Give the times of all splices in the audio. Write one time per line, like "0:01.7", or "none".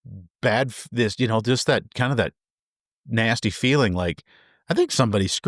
none